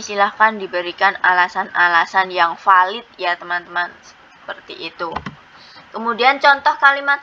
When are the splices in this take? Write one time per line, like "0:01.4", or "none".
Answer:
none